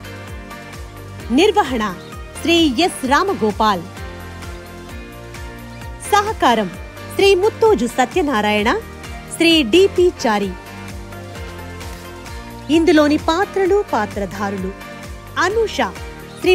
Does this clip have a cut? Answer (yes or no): no